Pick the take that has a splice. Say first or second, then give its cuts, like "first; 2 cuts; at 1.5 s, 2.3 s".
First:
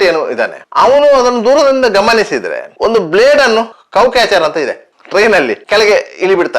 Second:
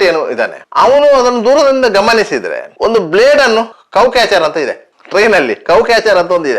first; 1 cut; at 5.6 s